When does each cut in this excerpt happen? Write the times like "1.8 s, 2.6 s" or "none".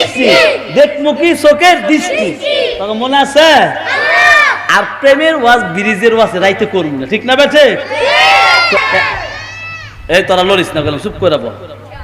8.8 s